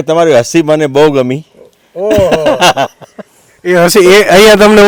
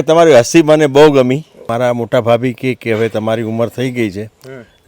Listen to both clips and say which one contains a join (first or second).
second